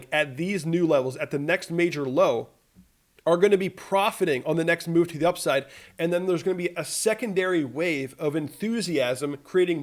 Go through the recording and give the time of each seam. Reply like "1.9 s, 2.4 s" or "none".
none